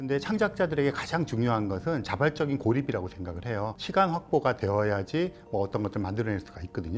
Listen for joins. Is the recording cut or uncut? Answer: uncut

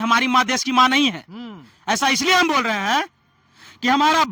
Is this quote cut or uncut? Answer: uncut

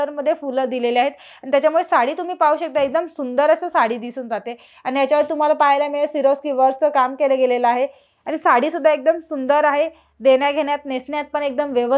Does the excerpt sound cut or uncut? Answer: uncut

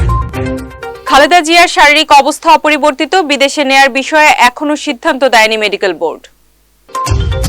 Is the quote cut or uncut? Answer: cut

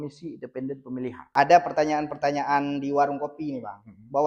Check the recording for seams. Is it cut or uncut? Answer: cut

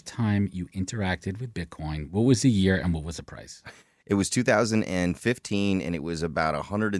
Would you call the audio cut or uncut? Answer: uncut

